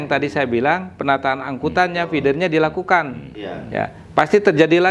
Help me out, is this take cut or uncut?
uncut